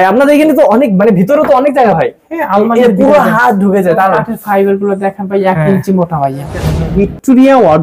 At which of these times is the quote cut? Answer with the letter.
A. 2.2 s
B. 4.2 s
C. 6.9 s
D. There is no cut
C